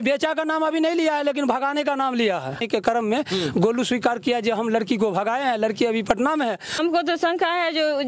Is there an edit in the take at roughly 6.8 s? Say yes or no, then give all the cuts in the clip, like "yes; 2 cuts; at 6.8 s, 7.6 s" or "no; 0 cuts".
yes; 2 cuts; at 2.6 s, 6.8 s